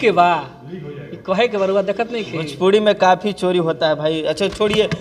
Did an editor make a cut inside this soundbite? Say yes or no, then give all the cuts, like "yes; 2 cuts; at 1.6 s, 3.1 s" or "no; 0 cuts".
no; 0 cuts